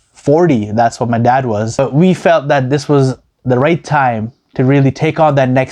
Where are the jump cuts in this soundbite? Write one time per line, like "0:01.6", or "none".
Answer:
0:01.7